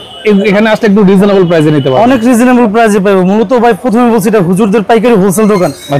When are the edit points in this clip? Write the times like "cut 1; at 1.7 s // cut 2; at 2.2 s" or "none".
none